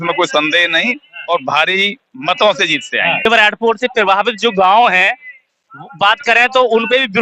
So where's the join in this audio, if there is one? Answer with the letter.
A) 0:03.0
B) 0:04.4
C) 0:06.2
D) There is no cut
D